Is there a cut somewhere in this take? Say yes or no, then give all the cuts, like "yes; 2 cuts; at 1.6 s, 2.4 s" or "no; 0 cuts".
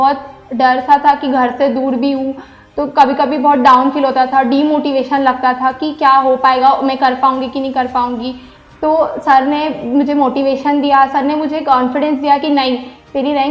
no; 0 cuts